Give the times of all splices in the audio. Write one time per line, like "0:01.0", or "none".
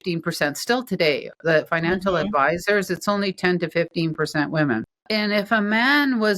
0:04.9